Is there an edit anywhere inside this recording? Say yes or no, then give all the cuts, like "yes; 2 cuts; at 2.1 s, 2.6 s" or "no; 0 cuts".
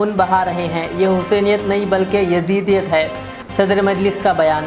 no; 0 cuts